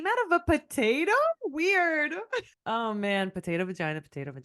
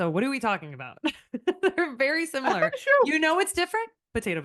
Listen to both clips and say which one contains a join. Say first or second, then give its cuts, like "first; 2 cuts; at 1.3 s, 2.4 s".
first; 1 cut; at 2.5 s